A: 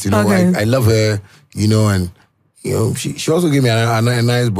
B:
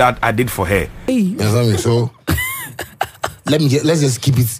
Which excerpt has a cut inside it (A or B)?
B